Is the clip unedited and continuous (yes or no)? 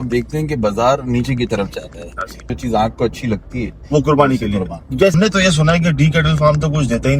no